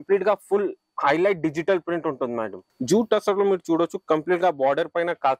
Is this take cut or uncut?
cut